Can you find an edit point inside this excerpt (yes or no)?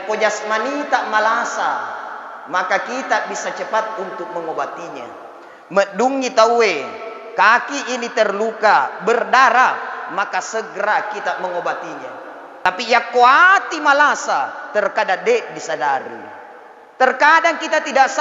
yes